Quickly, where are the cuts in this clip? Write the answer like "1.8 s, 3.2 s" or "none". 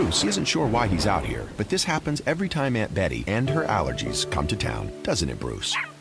2.0 s